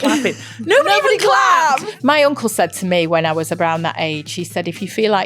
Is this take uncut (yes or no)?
no